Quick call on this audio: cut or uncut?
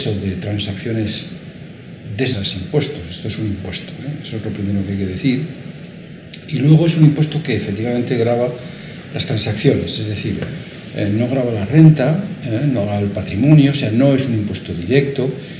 uncut